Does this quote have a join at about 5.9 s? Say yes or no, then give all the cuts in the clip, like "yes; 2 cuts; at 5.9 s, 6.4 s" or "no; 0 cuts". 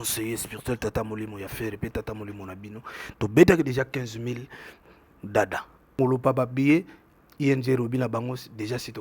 yes; 1 cut; at 5.9 s